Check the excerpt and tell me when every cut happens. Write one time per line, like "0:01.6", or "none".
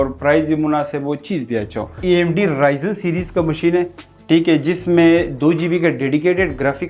0:02.0